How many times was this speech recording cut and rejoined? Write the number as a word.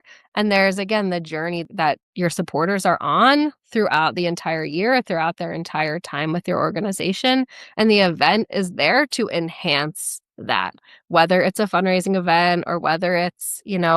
one